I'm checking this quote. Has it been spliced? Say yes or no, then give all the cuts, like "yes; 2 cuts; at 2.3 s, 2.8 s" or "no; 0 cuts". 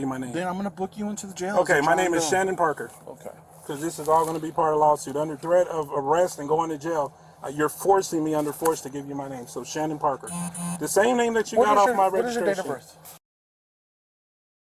no; 0 cuts